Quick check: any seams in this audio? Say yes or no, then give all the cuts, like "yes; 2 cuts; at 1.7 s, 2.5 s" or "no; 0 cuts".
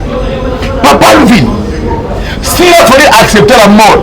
no; 0 cuts